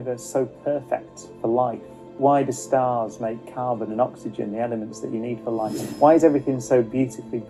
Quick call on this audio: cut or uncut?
uncut